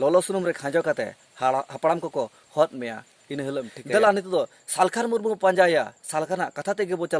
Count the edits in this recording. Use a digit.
1